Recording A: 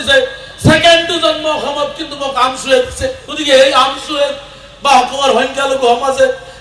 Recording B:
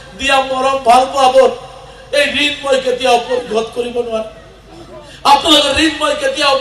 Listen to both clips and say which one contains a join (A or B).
A